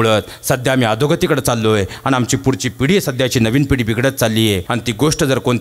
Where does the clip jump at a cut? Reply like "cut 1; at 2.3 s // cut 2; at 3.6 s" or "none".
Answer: cut 1; at 4.6 s

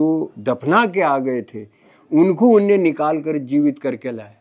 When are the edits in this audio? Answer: none

